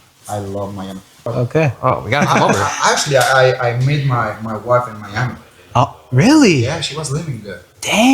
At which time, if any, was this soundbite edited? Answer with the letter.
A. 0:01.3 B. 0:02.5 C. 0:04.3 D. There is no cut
A